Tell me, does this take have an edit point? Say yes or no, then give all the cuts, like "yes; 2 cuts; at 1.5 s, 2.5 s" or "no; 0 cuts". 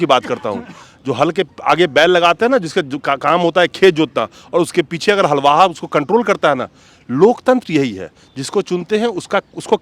no; 0 cuts